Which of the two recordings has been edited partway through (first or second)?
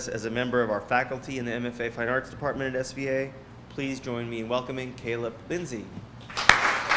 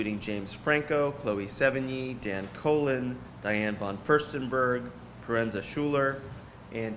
second